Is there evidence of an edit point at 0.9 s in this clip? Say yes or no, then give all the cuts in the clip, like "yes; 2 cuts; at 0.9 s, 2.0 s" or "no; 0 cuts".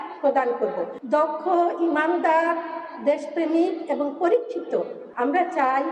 yes; 2 cuts; at 0.9 s, 5.0 s